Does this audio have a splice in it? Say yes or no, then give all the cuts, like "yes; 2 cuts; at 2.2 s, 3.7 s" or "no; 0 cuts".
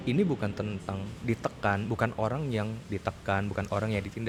no; 0 cuts